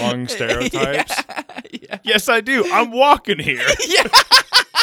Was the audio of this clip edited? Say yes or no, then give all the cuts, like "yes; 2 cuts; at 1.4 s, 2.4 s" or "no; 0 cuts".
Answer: yes; 1 cut; at 1.9 s